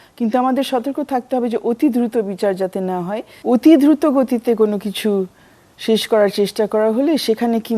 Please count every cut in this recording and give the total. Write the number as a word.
one